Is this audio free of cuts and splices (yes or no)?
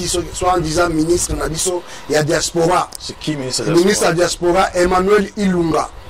yes